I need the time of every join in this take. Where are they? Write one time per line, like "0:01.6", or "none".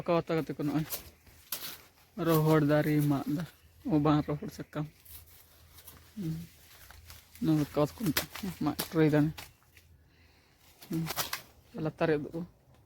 0:11.1